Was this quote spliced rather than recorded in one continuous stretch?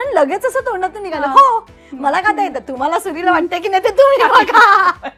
no; 0 cuts

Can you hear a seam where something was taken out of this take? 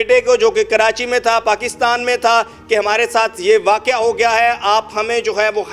no; 0 cuts

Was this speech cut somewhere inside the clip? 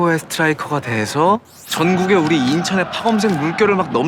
no; 0 cuts

